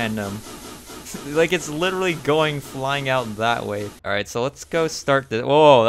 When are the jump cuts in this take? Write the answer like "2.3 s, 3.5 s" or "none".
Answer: 3.9 s

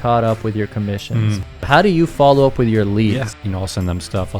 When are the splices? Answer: 1.6 s, 3.3 s

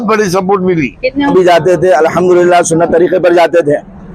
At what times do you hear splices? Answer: 1.3 s

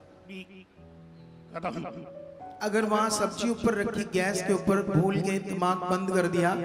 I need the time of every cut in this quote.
2.4 s

